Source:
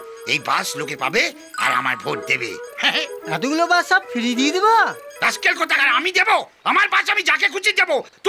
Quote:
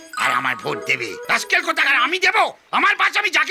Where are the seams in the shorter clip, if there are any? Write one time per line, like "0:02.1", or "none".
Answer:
0:01.2